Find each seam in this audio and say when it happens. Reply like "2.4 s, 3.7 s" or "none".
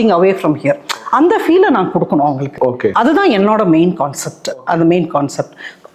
none